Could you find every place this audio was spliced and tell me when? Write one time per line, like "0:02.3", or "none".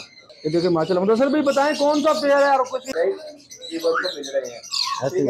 0:02.9